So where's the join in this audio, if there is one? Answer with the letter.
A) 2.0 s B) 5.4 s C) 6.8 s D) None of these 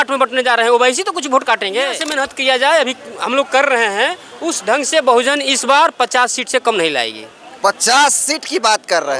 A